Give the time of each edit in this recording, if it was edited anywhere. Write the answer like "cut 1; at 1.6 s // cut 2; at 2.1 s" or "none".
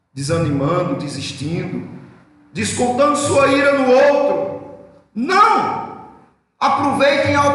none